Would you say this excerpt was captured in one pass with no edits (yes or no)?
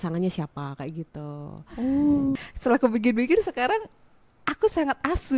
no